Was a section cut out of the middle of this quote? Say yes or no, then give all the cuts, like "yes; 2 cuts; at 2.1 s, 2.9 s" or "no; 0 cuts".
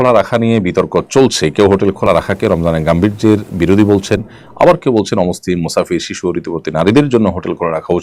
no; 0 cuts